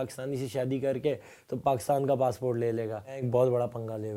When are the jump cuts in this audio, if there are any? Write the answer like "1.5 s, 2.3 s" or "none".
3.3 s